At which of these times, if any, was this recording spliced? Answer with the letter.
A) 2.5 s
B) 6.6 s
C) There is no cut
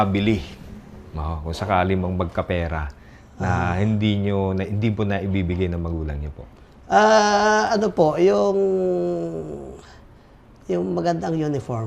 C